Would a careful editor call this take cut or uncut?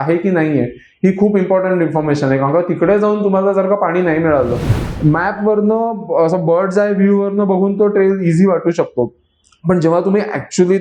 cut